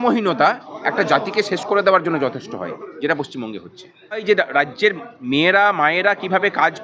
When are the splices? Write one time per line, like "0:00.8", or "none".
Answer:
0:04.2